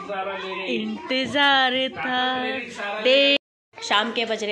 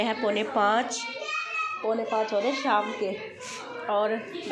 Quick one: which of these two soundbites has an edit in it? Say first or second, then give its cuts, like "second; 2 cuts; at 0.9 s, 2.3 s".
first; 1 cut; at 3.4 s